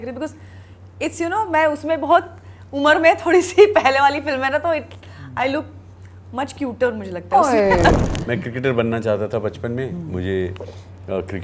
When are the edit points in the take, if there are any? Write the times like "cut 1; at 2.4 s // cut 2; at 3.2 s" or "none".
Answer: cut 1; at 8.0 s